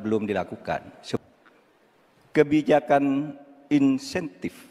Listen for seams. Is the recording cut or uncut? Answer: cut